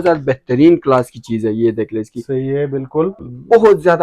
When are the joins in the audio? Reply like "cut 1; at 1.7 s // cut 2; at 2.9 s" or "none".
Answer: cut 1; at 3.1 s